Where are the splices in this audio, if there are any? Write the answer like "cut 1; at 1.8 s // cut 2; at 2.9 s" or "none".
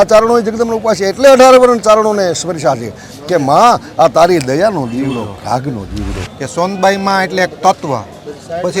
cut 1; at 6.2 s